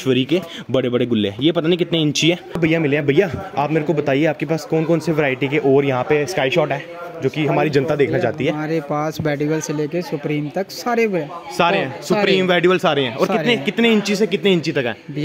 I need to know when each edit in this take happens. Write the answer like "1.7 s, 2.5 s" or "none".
none